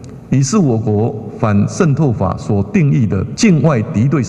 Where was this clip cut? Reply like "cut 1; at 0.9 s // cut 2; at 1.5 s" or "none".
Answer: cut 1; at 3.3 s